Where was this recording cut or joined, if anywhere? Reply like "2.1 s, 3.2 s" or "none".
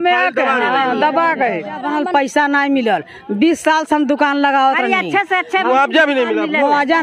1.8 s

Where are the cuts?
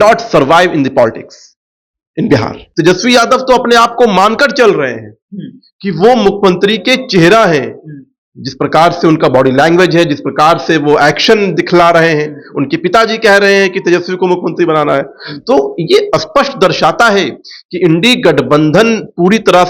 2.6 s

